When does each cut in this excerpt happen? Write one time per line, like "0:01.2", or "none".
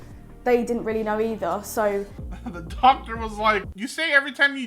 0:02.3